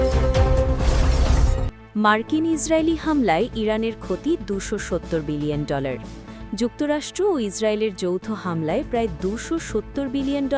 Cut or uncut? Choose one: uncut